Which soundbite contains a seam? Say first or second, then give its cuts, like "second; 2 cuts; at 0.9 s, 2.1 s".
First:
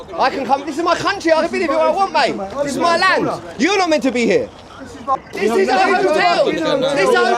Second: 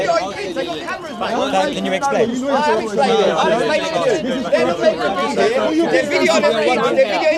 first; 1 cut; at 5.2 s